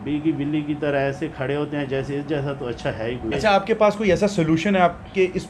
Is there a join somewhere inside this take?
yes; 1 cut; at 3.3 s

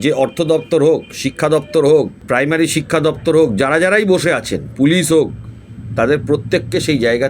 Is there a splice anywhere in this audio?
yes; 1 cut; at 2.2 s

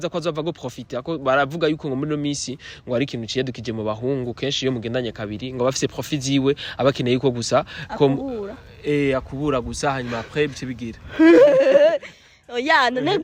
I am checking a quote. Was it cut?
no; 0 cuts

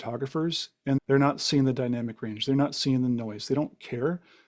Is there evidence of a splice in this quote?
yes; 1 cut; at 1.0 s

